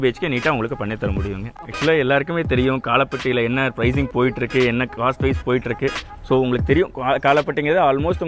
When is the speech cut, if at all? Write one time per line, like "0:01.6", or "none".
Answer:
0:01.6